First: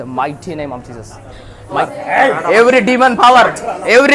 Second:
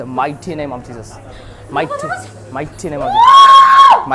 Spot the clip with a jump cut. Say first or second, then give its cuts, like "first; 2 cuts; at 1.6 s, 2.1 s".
first; 1 cut; at 1.9 s